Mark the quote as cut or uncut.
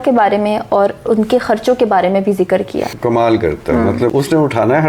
cut